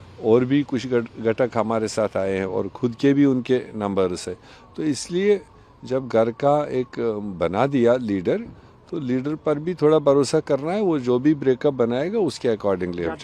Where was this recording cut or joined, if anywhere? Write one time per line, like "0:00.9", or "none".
none